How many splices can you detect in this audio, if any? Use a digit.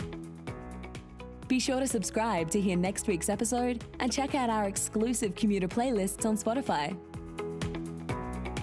2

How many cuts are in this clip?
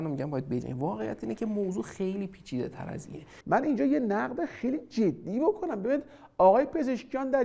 1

